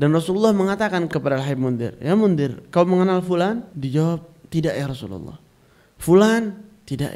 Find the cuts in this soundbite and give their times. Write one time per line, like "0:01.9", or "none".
0:01.1
0:03.7